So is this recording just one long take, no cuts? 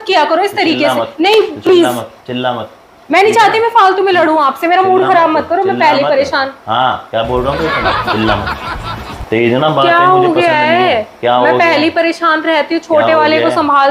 yes; 0 cuts

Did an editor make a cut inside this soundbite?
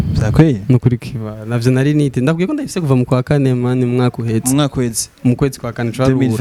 no; 0 cuts

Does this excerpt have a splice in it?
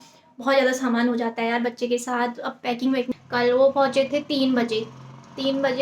yes; 1 cut; at 3.1 s

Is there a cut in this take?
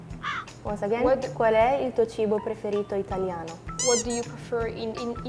no; 0 cuts

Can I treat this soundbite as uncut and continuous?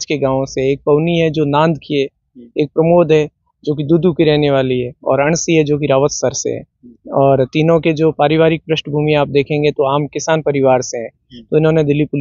yes; 0 cuts

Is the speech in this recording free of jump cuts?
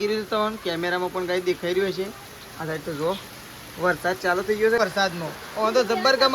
no; 1 cut; at 4.8 s

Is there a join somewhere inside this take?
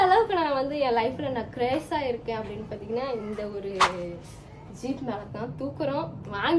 no; 0 cuts

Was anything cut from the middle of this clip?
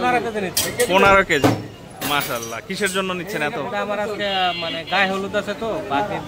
no; 0 cuts

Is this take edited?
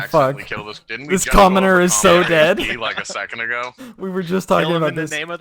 no; 0 cuts

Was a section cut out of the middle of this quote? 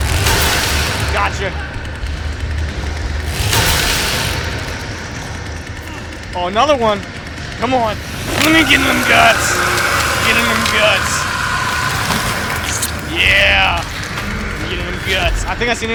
no; 0 cuts

